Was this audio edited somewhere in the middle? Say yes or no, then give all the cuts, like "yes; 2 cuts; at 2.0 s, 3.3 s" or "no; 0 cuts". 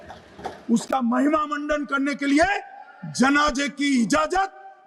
no; 0 cuts